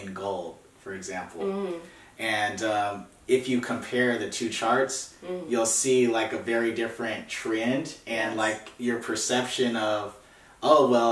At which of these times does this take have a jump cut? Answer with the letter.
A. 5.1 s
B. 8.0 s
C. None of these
C